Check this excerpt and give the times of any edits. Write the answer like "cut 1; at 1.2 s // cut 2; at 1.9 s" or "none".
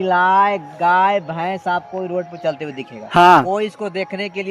none